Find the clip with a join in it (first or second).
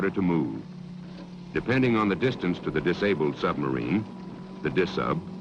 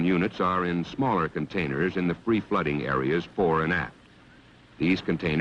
first